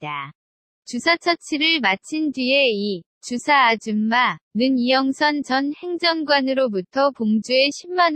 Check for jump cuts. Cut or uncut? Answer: cut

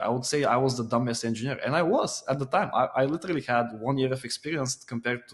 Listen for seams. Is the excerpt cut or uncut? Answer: uncut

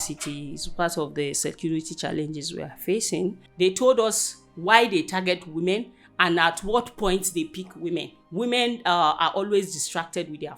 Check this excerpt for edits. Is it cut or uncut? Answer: cut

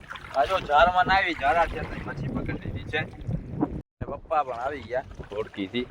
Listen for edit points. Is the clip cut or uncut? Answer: cut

